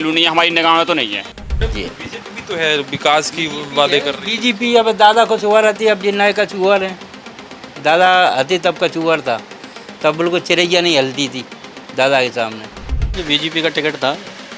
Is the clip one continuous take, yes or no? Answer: no